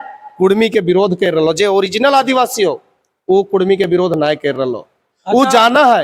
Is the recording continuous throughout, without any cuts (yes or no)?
yes